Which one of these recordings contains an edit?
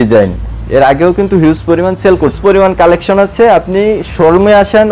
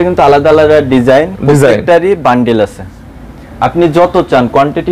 first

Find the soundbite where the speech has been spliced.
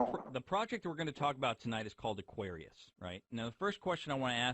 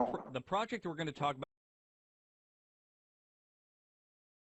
first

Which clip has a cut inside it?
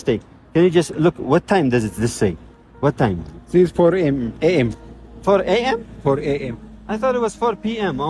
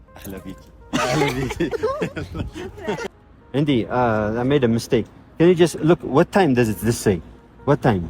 second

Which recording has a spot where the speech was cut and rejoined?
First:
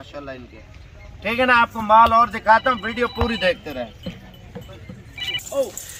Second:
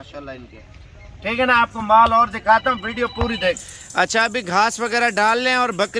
second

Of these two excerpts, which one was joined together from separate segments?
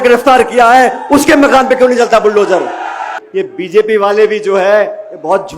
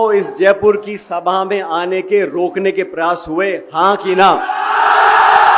first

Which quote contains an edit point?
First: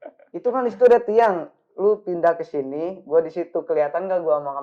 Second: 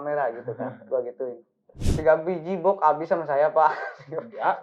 second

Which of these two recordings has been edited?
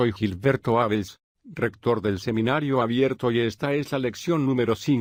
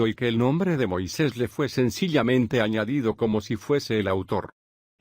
second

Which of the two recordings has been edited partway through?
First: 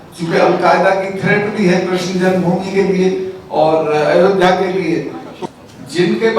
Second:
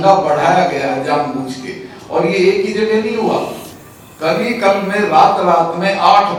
first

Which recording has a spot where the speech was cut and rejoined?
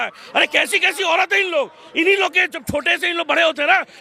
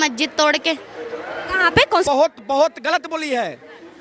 second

